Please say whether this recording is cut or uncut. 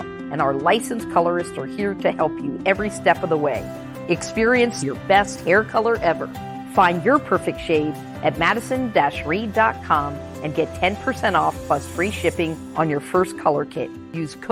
uncut